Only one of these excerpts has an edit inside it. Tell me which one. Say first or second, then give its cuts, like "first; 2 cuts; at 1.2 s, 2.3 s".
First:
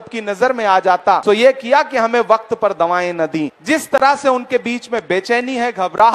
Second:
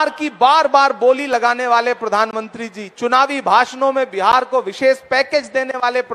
first; 2 cuts; at 1.2 s, 3.5 s